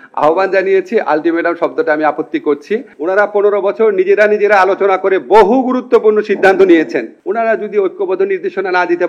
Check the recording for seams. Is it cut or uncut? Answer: cut